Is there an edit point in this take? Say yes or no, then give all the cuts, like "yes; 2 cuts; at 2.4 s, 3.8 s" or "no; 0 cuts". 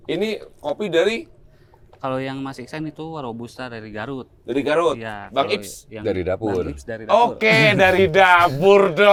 no; 0 cuts